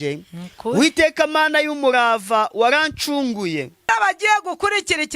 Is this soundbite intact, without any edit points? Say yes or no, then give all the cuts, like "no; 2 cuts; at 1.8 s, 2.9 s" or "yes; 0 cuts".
no; 1 cut; at 3.9 s